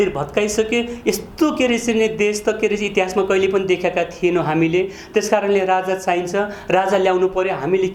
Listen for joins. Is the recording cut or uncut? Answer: uncut